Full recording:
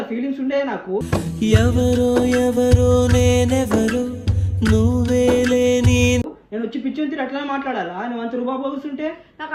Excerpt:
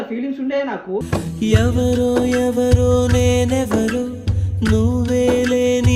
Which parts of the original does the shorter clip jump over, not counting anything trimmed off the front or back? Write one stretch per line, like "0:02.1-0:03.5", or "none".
none